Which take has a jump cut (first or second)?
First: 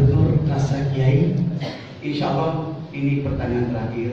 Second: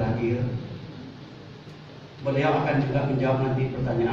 first